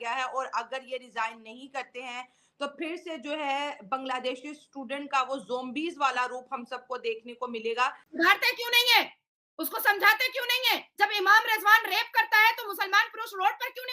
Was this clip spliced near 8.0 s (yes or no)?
yes